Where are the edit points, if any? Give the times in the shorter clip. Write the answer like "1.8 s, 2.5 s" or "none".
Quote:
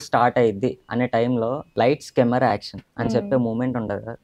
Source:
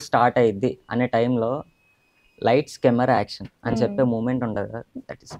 1.6 s